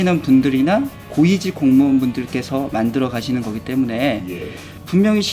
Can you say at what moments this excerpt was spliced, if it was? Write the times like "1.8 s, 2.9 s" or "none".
1.0 s